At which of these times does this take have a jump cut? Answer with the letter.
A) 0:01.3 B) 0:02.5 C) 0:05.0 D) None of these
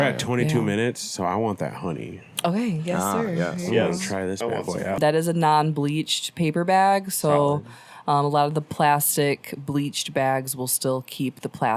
C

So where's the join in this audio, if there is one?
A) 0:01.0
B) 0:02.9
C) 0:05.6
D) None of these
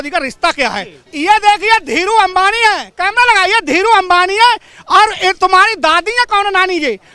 A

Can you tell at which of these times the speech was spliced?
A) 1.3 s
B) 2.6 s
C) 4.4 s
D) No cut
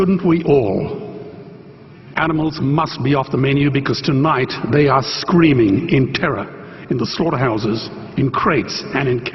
D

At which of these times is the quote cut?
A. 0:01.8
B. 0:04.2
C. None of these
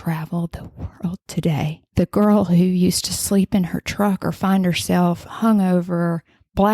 A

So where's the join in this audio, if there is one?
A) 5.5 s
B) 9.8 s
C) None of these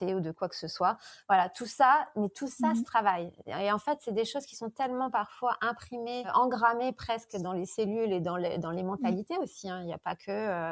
C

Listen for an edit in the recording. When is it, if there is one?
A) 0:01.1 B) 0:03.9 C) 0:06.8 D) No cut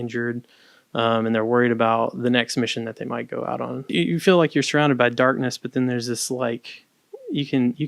B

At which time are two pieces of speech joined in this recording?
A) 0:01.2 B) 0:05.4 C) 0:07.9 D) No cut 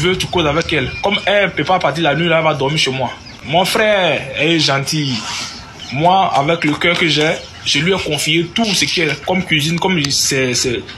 C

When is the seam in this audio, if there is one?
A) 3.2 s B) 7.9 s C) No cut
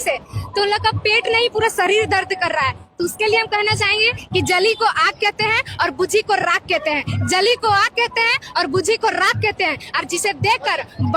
C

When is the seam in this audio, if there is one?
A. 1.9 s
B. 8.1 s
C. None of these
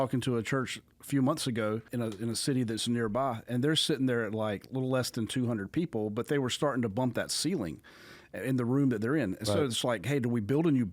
A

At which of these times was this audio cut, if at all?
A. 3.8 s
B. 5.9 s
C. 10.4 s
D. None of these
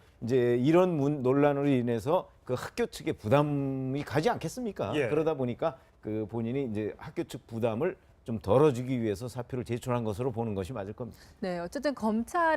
B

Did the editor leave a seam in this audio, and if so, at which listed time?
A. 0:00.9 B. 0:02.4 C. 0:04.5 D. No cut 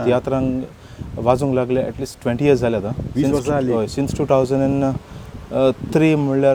D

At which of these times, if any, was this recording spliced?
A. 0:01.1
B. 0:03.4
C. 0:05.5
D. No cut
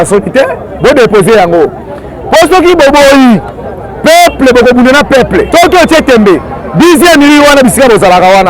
C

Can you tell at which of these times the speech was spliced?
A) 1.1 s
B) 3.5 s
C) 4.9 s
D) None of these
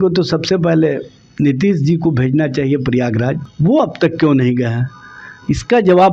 B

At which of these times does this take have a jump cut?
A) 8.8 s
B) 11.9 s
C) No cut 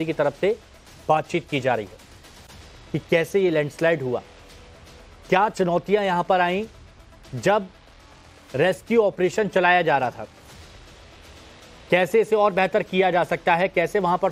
C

